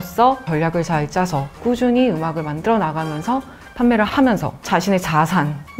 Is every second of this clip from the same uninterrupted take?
yes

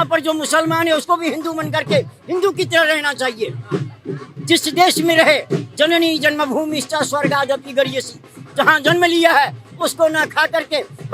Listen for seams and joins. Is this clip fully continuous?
yes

